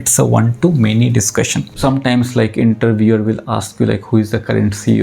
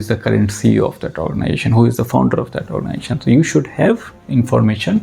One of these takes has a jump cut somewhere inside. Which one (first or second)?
first